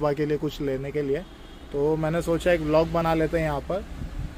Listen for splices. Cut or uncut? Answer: uncut